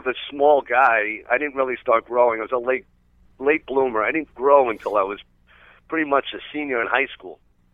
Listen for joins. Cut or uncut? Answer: uncut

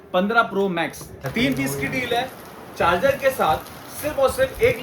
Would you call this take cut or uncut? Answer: cut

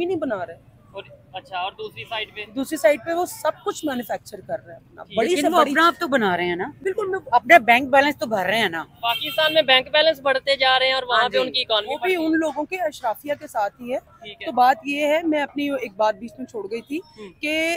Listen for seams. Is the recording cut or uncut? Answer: uncut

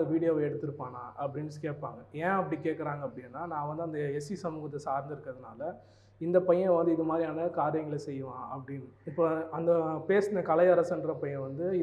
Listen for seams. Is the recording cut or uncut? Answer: uncut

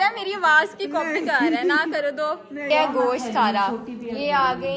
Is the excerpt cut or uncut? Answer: cut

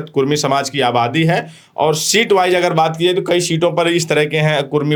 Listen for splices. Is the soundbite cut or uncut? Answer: uncut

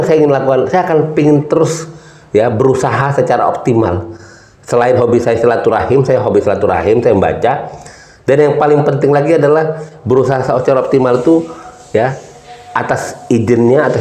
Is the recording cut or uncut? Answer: uncut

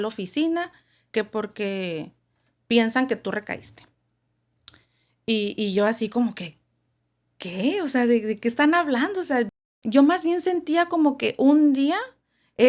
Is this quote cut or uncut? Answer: cut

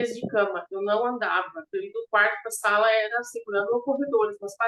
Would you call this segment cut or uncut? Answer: uncut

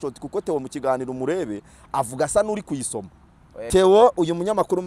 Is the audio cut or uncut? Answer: cut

